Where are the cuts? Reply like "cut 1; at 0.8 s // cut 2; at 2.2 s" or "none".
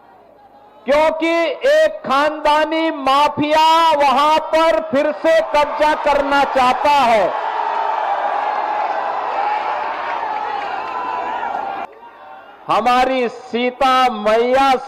cut 1; at 11.8 s